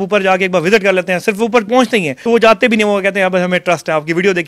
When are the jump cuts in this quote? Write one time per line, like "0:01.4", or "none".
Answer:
0:02.1